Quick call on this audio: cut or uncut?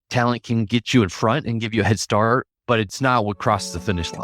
cut